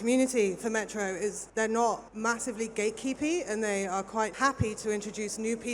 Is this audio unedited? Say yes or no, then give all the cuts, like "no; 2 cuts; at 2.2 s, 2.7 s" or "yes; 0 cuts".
no; 3 cuts; at 1.4 s, 2.1 s, 4.3 s